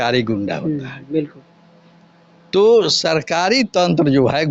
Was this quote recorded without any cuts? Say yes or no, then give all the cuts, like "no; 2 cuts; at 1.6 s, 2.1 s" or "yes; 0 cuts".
yes; 0 cuts